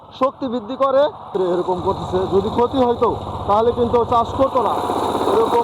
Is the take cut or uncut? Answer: cut